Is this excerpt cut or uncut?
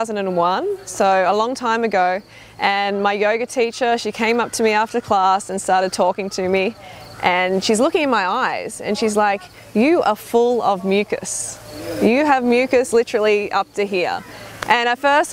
uncut